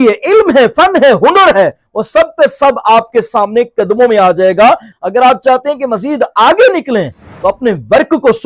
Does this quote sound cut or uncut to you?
cut